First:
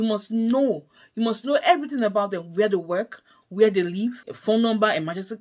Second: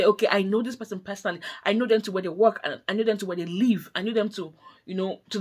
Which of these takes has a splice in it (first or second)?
first